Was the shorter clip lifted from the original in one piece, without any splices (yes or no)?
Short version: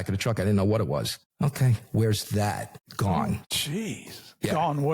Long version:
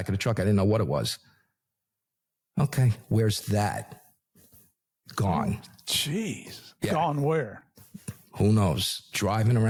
no